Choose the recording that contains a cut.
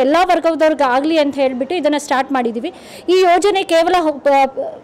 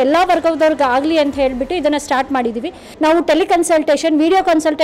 second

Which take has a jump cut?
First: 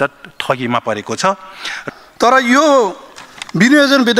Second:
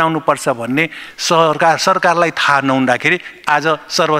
first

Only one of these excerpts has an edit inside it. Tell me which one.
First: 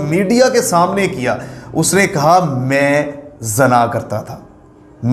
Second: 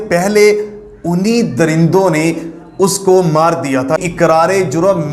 second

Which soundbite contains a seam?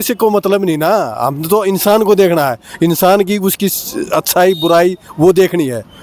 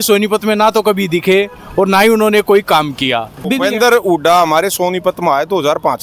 second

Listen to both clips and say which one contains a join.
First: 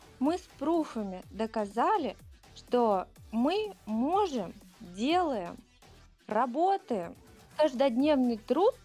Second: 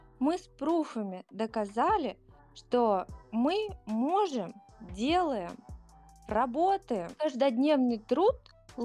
second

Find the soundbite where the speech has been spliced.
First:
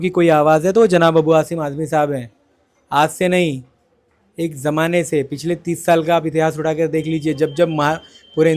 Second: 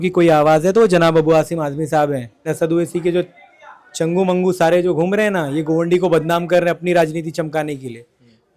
second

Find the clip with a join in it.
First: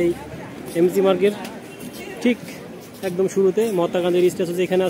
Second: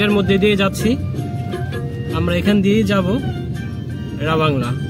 second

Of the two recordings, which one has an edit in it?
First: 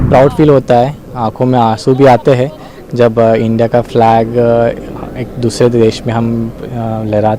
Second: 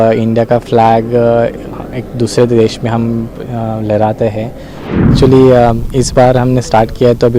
second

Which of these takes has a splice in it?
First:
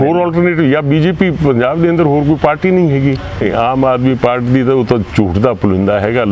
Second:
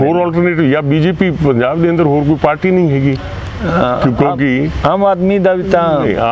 first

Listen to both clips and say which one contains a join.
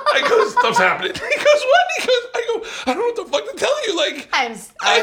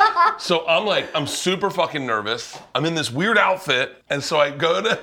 second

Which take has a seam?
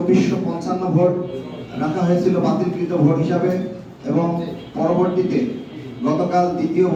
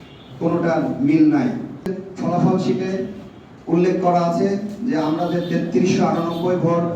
second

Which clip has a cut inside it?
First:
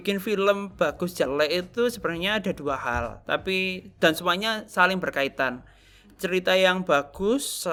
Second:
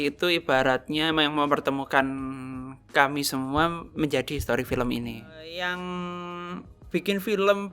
second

